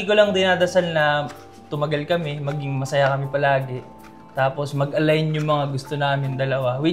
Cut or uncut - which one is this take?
uncut